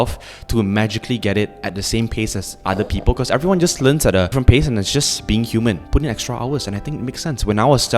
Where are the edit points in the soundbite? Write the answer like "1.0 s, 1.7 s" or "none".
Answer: 4.3 s, 5.8 s